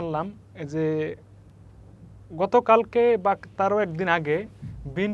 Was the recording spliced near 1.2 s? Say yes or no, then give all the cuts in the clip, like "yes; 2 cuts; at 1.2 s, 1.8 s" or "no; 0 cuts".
no; 0 cuts